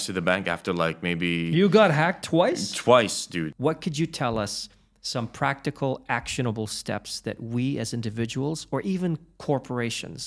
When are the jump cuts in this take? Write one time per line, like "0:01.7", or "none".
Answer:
0:03.5